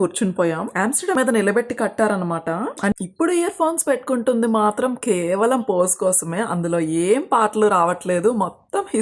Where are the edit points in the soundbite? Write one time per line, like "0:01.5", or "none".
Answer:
0:01.2
0:02.9